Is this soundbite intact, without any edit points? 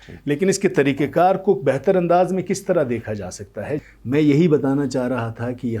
no; 1 cut; at 3.8 s

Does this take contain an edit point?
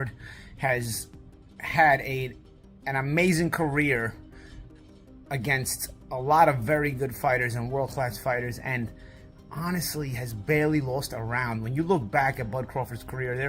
no; 0 cuts

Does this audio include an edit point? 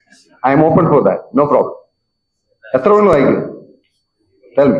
no; 0 cuts

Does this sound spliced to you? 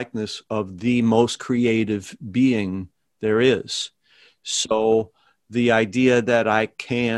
no; 0 cuts

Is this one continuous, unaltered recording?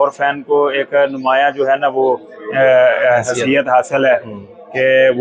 yes; 0 cuts

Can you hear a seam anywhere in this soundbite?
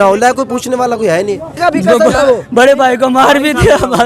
yes; 1 cut; at 1.5 s

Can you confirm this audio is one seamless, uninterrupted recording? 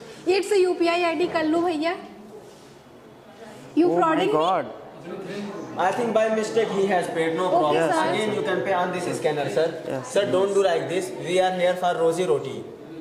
yes; 0 cuts

